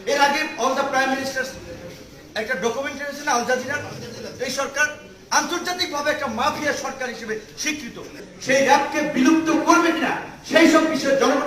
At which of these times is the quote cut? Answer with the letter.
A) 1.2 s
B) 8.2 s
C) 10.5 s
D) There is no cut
B